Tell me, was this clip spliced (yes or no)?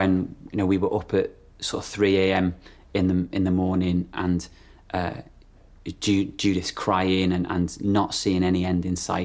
no